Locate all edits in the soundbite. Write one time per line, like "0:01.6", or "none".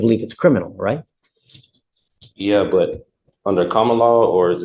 none